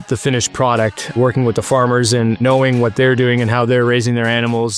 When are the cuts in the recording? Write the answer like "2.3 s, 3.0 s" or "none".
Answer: 1.2 s, 2.4 s